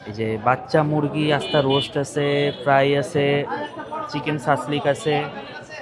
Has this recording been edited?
no; 0 cuts

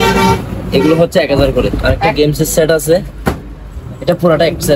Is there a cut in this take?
yes; 1 cut; at 1.7 s

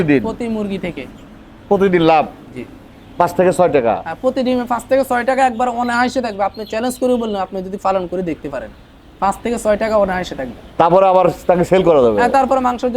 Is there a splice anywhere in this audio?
no; 0 cuts

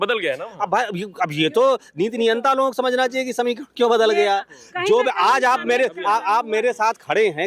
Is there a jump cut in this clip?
no; 0 cuts

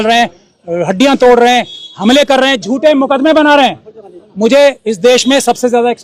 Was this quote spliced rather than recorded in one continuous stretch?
no; 0 cuts

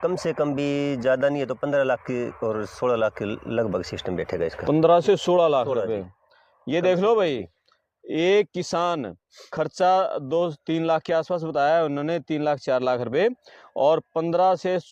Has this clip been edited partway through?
no; 0 cuts

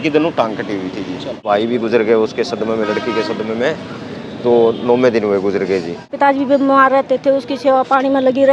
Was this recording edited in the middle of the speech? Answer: yes; 2 cuts; at 1.5 s, 6.1 s

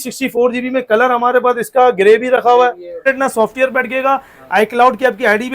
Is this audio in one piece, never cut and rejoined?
no; 1 cut; at 3.0 s

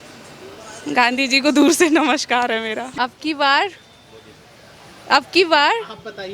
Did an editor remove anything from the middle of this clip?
yes; 1 cut; at 2.8 s

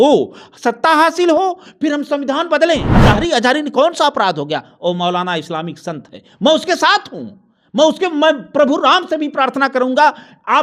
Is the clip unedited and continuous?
no; 1 cut; at 2.9 s

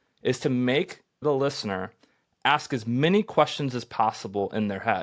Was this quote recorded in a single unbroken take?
no; 1 cut; at 1.2 s

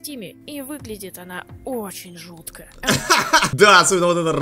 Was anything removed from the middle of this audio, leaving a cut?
yes; 1 cut; at 3.5 s

